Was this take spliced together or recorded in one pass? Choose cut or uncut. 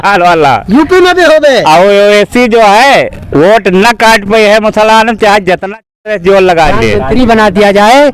cut